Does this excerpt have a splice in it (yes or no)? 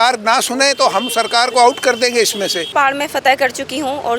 yes